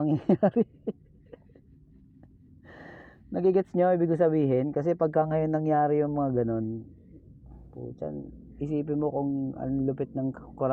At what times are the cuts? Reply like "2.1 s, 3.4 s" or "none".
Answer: none